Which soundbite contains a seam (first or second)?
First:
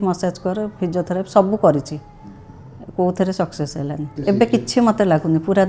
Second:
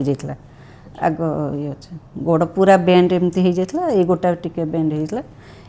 first